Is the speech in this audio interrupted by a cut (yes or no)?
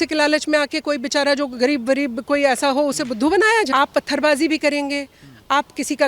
yes